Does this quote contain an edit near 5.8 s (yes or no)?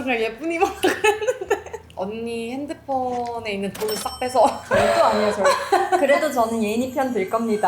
no